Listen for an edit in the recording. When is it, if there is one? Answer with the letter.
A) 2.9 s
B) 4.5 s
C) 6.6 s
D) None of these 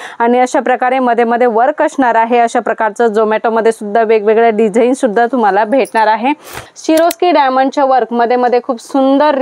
C